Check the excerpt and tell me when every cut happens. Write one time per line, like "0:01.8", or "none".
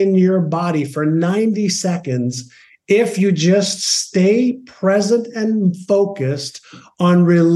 none